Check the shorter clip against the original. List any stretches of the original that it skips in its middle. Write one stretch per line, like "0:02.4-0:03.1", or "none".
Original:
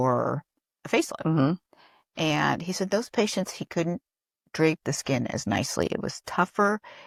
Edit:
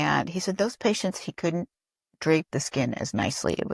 none